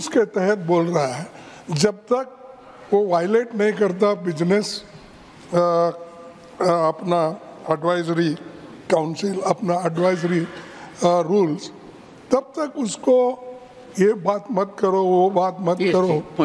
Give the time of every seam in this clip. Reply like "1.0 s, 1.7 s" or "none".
none